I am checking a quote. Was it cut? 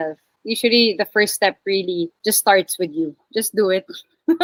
no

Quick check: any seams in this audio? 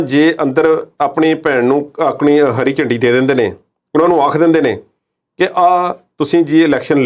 no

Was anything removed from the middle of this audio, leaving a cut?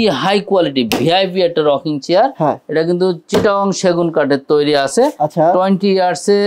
no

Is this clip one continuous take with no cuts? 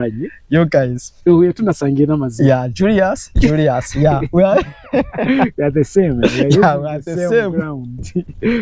yes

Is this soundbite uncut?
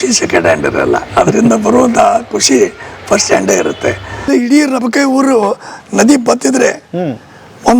no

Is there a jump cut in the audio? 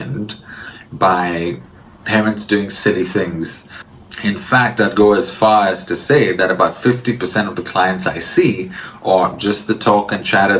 no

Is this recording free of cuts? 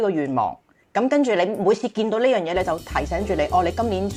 yes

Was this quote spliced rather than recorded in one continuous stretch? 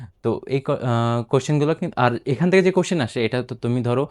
no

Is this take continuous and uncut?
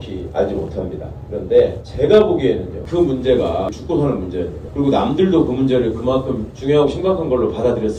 no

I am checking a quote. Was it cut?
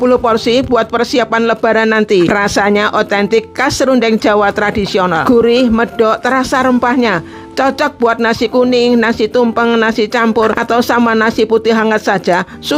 yes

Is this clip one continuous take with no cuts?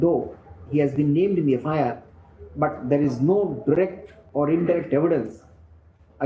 yes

